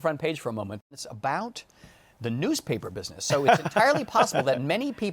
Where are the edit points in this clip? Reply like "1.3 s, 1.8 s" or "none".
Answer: 0.9 s

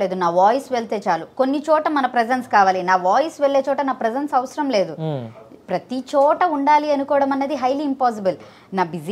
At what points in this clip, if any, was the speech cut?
none

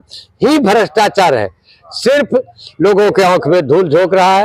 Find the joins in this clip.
none

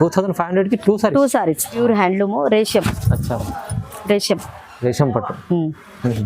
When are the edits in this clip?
1.8 s

